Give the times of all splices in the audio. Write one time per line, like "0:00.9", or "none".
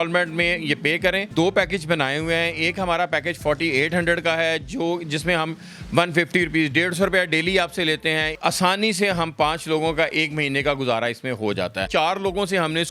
0:01.3
0:08.4
0:11.8